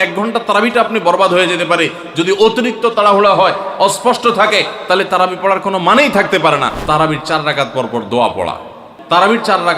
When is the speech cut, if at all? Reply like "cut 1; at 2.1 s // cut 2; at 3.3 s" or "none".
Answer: cut 1; at 6.7 s // cut 2; at 8.9 s